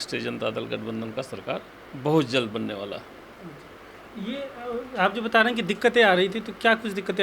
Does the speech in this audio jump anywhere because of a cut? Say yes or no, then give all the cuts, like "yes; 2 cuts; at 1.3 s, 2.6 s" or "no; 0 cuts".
no; 0 cuts